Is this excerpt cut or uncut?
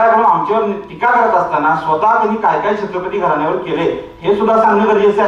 uncut